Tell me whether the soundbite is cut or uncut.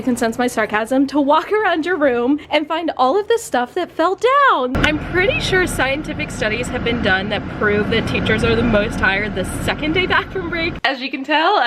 cut